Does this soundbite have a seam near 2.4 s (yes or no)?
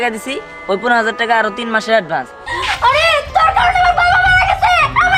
yes